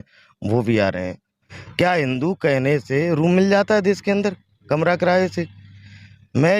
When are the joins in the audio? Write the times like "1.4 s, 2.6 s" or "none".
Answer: 1.5 s